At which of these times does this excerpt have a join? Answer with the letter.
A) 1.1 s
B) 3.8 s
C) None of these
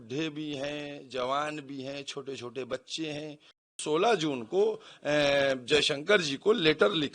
B